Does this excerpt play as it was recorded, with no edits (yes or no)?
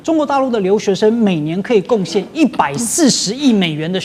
yes